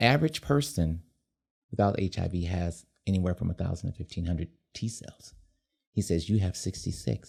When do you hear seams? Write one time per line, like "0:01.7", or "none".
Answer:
none